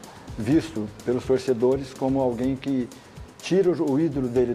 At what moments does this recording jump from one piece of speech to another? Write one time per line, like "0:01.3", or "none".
none